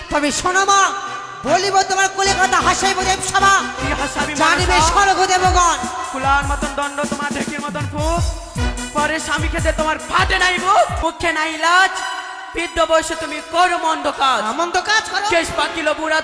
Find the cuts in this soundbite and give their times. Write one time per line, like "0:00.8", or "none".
0:11.0